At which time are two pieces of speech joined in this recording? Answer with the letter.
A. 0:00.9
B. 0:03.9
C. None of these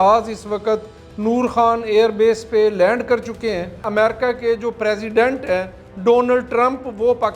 B